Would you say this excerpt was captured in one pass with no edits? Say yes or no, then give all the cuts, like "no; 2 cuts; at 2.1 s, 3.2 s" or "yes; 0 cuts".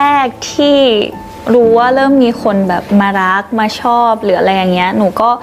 yes; 0 cuts